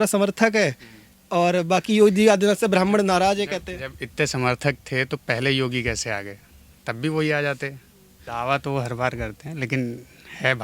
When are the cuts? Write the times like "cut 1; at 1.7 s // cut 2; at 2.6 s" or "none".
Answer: cut 1; at 8.2 s